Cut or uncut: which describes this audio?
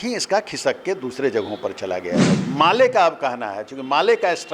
cut